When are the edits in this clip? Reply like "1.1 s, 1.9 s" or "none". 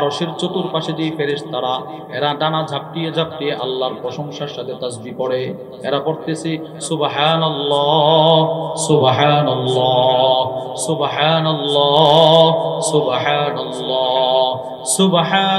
none